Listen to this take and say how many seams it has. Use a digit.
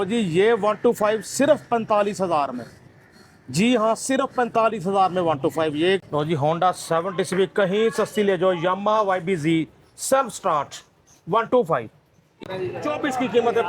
2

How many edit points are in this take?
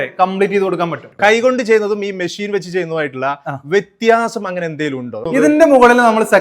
2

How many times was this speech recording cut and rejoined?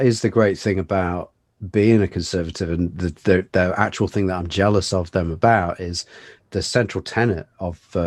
0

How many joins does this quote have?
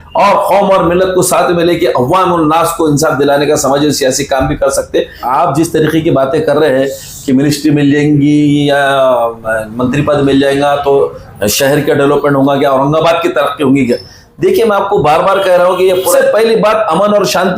2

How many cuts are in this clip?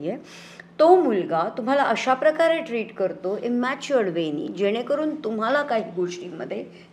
0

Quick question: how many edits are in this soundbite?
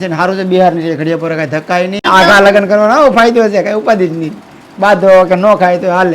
1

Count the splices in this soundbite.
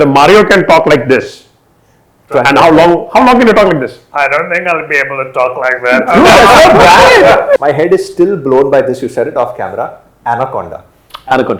1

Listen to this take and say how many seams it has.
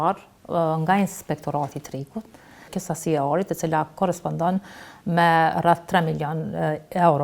1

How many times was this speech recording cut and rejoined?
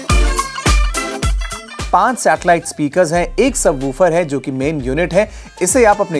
1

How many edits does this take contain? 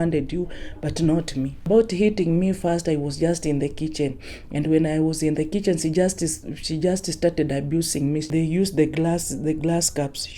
2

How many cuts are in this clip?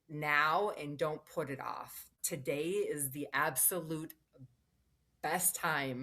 1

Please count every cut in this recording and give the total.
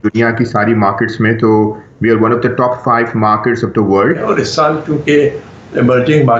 1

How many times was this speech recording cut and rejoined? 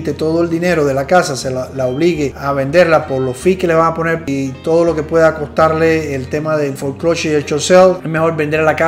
1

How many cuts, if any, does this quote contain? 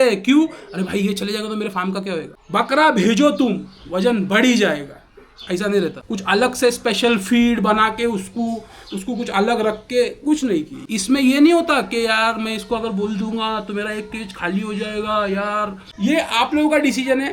4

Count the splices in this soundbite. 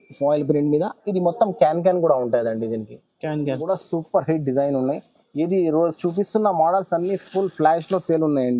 1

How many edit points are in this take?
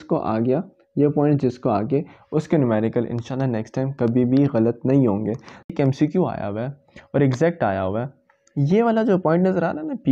1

